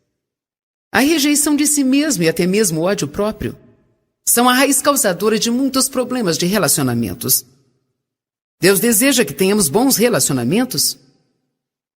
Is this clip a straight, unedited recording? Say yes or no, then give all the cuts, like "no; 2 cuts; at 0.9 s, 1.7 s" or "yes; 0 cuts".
no; 1 cut; at 6.1 s